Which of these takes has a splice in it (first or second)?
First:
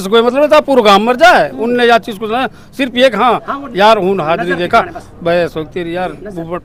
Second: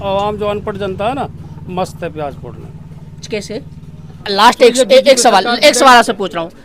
second